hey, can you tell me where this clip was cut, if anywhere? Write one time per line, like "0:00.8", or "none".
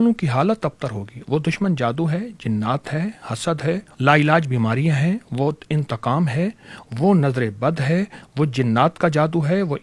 0:03.9